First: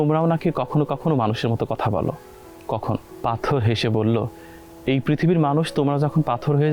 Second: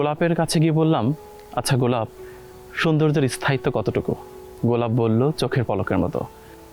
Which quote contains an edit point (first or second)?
first